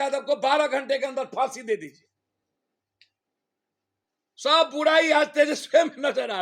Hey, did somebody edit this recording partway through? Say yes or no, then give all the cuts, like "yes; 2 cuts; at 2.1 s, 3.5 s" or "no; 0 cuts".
no; 0 cuts